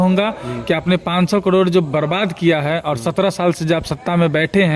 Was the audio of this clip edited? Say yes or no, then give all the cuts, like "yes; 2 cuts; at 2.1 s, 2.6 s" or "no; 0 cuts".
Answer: no; 0 cuts